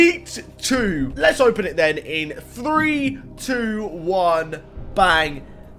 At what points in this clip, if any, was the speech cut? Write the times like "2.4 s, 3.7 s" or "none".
1.1 s